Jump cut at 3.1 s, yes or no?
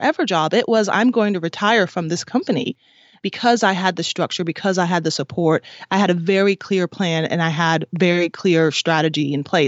yes